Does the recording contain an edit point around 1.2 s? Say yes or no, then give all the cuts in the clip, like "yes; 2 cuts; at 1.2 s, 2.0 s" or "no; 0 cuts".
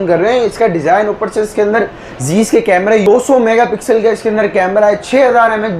no; 1 cut; at 3.1 s